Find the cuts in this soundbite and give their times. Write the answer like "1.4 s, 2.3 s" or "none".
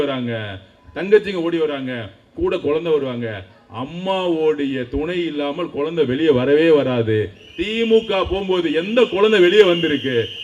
none